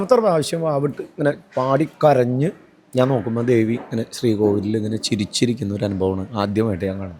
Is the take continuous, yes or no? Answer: yes